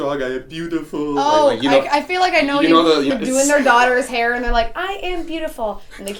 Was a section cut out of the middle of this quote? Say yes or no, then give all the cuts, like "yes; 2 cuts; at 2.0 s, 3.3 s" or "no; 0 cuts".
yes; 1 cut; at 3.1 s